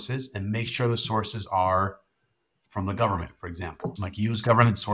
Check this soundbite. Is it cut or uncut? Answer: cut